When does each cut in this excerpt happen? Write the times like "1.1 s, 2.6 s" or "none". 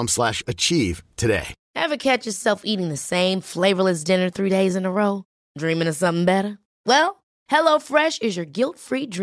1.6 s